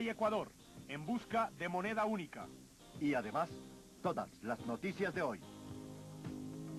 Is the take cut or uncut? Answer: uncut